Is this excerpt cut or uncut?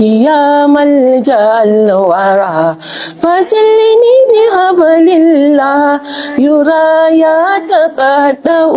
uncut